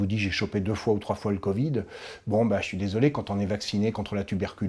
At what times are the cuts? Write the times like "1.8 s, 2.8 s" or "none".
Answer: none